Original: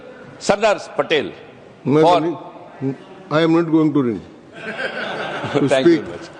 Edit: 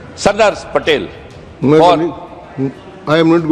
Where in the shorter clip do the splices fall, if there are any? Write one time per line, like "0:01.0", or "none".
none